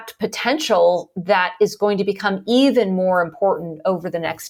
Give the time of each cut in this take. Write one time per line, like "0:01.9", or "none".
none